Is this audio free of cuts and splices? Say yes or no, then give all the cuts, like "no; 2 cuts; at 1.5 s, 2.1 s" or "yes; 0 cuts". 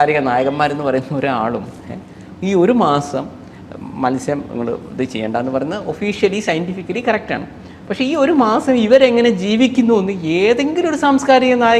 yes; 0 cuts